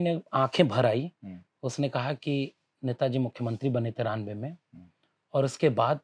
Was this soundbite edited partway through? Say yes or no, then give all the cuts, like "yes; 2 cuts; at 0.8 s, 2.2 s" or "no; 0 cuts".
no; 0 cuts